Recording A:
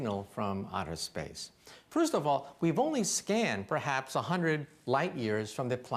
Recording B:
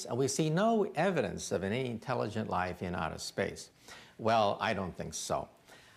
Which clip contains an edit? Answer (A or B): A